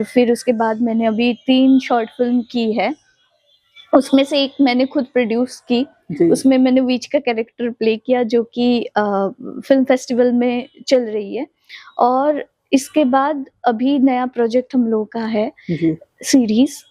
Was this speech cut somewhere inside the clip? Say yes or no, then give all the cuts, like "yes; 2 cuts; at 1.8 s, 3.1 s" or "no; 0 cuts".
no; 0 cuts